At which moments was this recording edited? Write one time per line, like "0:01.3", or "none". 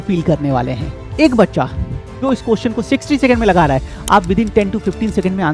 0:01.0